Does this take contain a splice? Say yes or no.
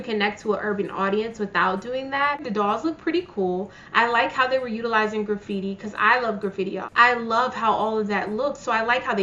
yes